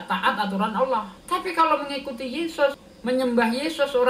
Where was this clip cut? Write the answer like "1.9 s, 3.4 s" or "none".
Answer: 1.1 s, 2.9 s

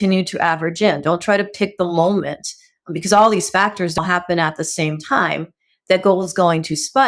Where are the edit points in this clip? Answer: 4.0 s

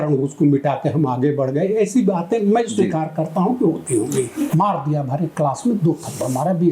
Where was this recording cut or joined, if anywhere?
4.5 s

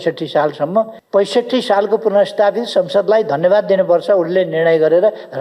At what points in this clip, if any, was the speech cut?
1.0 s

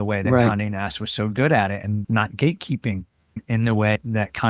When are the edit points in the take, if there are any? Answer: 3.4 s

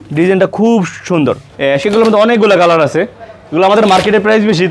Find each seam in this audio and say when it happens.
1.5 s

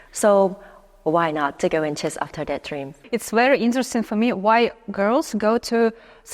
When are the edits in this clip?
3.0 s

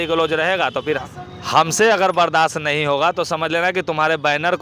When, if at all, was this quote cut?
1.1 s

